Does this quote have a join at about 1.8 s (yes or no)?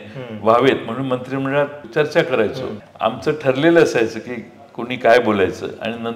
yes